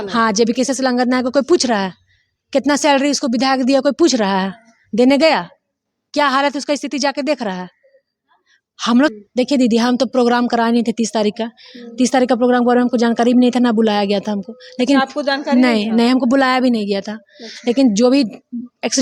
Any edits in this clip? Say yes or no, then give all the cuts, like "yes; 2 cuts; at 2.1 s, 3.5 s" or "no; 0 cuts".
yes; 1 cut; at 9.1 s